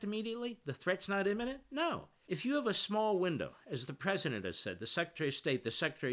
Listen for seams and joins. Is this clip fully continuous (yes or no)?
no